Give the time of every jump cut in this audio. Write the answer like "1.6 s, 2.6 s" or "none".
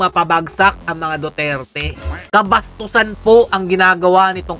2.2 s